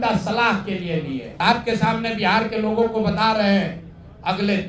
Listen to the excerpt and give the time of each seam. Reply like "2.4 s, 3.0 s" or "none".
1.4 s